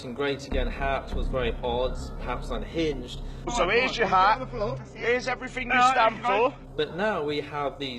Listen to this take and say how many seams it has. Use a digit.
2